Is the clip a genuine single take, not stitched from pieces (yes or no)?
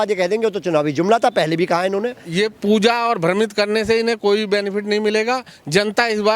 no